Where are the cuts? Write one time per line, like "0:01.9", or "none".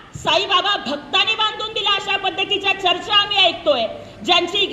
none